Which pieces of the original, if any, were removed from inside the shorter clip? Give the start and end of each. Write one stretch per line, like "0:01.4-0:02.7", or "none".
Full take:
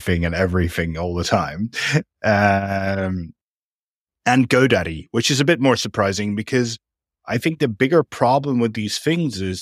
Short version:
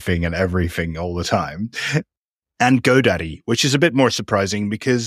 0:02.1-0:03.8